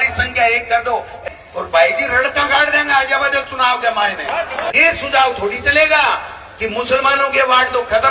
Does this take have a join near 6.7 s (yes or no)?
no